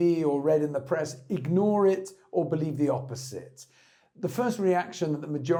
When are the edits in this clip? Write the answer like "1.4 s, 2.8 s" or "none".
none